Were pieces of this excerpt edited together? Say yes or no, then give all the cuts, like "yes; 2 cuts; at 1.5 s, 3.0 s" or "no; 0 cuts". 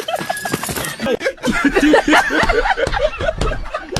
no; 0 cuts